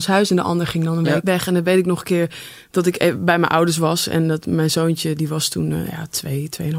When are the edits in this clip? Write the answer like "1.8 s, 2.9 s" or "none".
1.2 s